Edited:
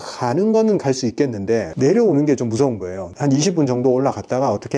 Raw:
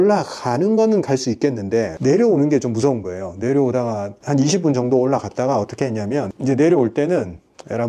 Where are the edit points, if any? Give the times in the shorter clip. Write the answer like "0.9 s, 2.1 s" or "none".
3.0 s